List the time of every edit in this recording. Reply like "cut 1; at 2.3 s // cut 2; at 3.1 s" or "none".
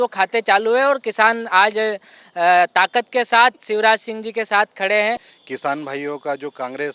cut 1; at 5.3 s